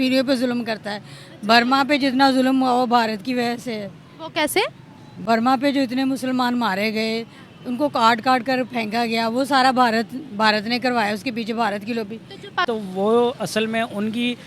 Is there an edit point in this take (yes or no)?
yes